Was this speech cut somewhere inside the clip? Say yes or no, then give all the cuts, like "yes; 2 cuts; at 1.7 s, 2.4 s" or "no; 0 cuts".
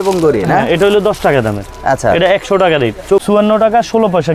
yes; 1 cut; at 3.2 s